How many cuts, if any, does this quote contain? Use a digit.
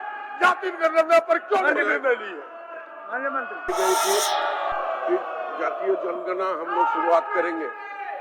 1